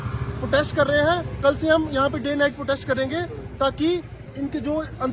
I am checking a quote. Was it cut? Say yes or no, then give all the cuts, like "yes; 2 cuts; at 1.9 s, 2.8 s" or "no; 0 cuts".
no; 0 cuts